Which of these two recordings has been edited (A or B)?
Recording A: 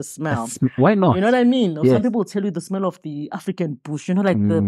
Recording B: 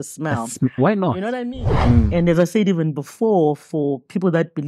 B